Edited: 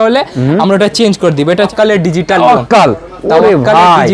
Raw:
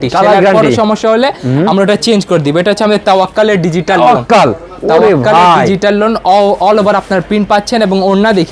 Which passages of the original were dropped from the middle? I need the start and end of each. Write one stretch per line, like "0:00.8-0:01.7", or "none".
0:02.8-0:03.3